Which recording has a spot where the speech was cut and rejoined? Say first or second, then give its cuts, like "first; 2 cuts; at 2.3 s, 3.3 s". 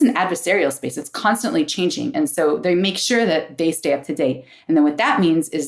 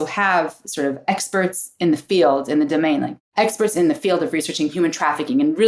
second; 1 cut; at 3.2 s